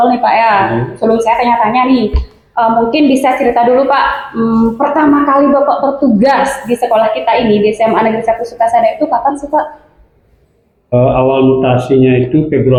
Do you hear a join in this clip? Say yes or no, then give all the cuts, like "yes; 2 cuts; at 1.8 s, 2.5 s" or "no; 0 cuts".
no; 0 cuts